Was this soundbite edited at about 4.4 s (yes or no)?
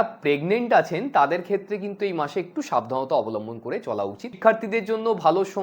yes